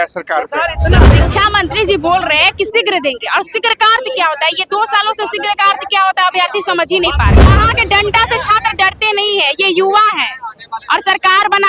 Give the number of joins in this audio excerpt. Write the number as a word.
two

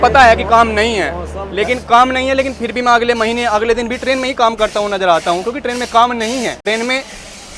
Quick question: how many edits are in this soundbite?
one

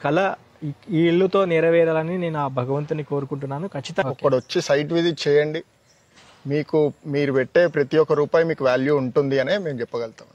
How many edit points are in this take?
one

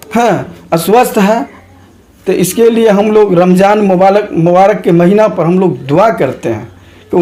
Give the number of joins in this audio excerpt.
zero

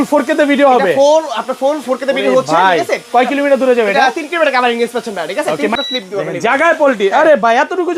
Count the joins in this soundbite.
one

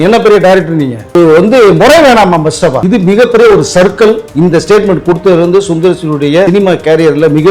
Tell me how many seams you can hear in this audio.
four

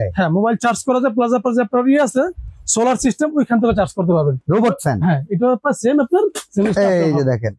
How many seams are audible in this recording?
one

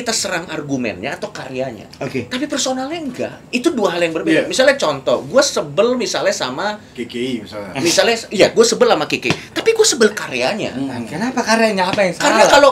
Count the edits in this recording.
one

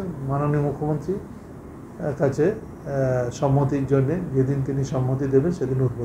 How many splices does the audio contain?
zero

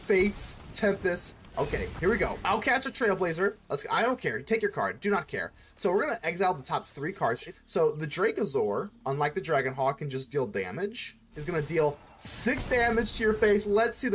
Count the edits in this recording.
three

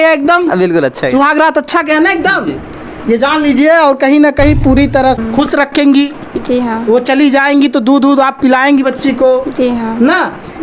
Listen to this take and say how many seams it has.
one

